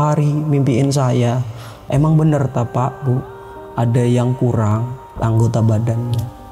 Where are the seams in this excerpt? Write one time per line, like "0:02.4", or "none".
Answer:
0:01.8
0:05.1